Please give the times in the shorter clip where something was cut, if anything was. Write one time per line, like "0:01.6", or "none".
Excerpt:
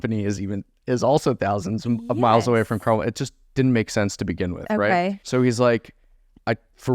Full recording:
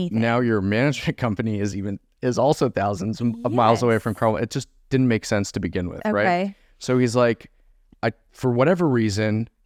0:05.2